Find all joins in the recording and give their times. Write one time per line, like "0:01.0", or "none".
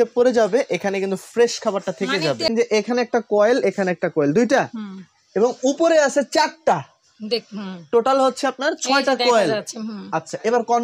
0:02.5